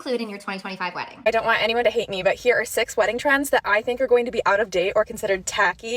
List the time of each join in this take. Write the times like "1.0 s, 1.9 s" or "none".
1.1 s